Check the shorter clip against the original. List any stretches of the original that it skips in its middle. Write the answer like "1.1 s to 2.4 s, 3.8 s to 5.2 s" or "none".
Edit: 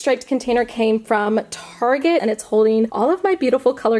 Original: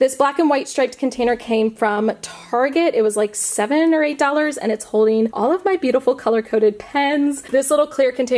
2.9 s to 4.6 s